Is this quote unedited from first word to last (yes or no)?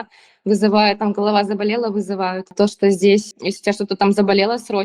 no